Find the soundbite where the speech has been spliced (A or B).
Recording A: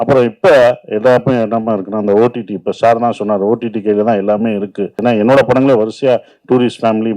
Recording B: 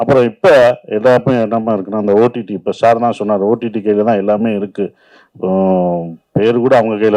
A